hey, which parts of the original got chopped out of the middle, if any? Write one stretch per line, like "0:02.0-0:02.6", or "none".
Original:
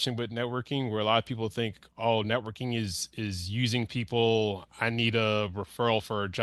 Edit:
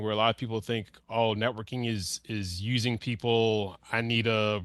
none